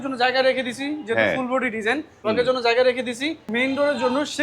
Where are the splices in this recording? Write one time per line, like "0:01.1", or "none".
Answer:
0:02.3
0:03.5